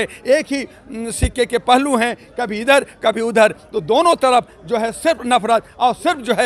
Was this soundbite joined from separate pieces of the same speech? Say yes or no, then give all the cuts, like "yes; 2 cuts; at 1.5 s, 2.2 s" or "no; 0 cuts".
no; 0 cuts